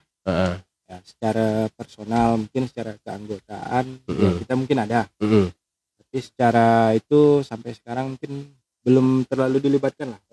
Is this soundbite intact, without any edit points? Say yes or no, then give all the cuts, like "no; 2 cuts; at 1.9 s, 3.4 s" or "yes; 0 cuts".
yes; 0 cuts